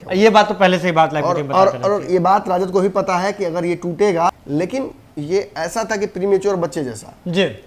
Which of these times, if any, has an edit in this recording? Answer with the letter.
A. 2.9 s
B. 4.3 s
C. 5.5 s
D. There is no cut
B